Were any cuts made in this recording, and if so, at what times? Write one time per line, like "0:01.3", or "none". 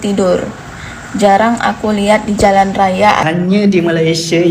0:03.2